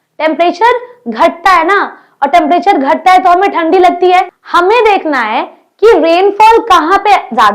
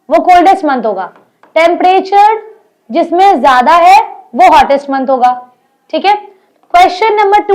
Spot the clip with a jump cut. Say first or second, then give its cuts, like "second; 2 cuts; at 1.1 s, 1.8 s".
first; 1 cut; at 4.4 s